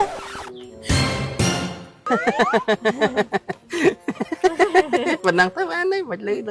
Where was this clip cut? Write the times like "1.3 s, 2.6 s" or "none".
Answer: 2.1 s